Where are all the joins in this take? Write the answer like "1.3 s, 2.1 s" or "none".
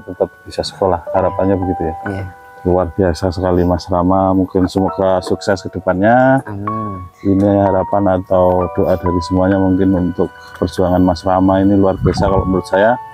none